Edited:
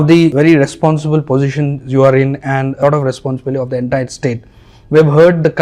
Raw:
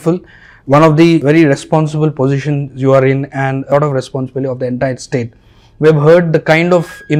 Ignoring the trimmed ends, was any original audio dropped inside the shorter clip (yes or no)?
no